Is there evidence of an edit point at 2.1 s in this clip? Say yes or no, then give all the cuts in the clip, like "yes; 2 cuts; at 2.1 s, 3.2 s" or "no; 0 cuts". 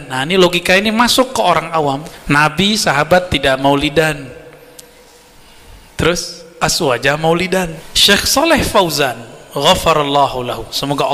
yes; 2 cuts; at 2.1 s, 7.9 s